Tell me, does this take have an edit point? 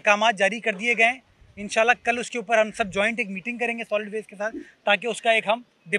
no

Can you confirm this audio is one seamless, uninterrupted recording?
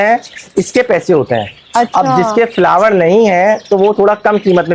yes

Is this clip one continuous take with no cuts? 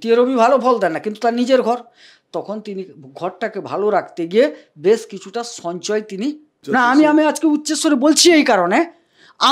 no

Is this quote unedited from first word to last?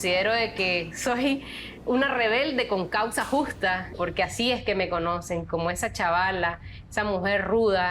no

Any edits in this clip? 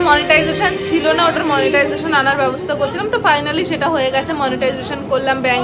no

